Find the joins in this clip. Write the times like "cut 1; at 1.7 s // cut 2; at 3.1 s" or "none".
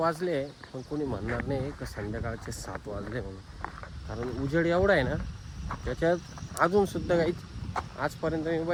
none